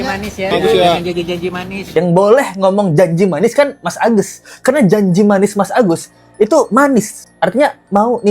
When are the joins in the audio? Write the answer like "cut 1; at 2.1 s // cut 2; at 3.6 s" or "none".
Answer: cut 1; at 1.9 s